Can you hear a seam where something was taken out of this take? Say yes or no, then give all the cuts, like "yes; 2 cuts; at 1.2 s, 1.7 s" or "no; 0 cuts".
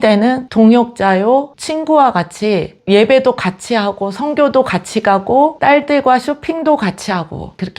no; 0 cuts